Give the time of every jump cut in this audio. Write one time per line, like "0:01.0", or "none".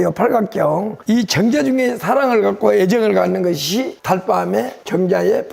0:00.9